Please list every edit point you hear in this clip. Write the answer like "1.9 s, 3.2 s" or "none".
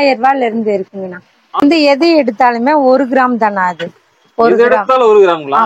1.6 s